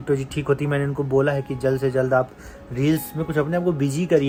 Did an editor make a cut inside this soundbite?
no; 0 cuts

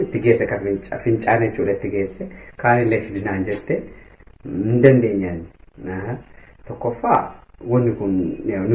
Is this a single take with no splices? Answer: yes; 0 cuts

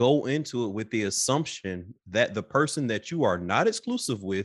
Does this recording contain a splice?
no; 0 cuts

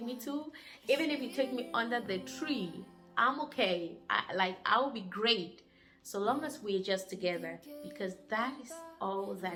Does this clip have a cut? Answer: no; 0 cuts

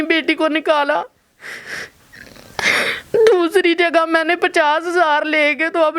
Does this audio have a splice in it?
no; 0 cuts

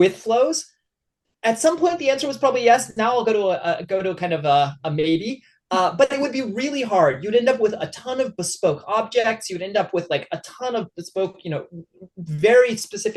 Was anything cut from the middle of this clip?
no; 0 cuts

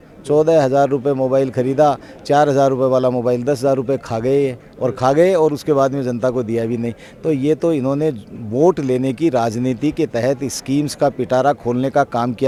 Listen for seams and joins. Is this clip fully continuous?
yes; 0 cuts

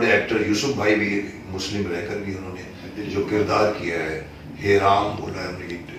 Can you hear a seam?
no; 0 cuts

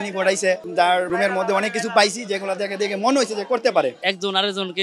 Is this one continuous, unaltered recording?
no; 2 cuts; at 1.1 s, 4.0 s

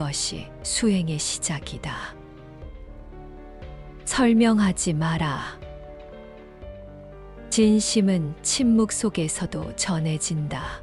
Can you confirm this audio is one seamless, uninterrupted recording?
yes; 0 cuts

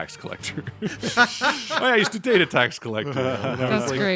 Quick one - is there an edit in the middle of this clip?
no; 0 cuts

